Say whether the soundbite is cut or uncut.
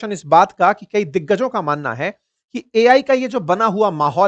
uncut